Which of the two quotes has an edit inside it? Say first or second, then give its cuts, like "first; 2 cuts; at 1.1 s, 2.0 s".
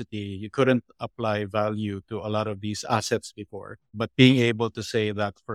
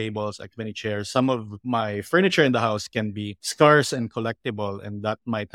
first; 1 cut; at 3.9 s